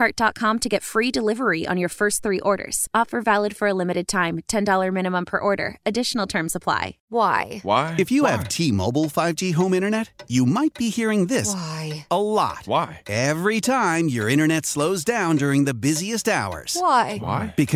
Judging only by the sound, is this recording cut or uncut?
cut